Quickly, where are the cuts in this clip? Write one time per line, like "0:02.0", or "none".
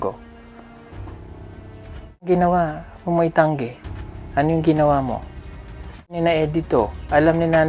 0:02.3
0:06.2